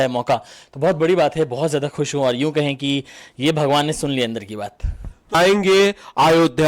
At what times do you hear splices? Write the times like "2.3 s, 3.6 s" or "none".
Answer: 5.3 s